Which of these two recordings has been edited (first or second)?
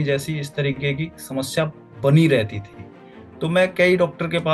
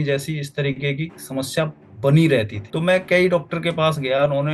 second